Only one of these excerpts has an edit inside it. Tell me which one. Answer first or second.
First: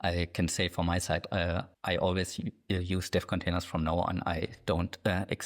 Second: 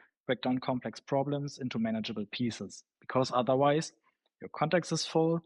first